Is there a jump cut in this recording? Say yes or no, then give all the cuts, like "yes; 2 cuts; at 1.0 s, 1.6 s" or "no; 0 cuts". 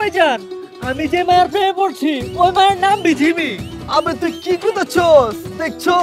no; 0 cuts